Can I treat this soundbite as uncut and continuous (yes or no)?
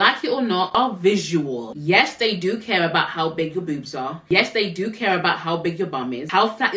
yes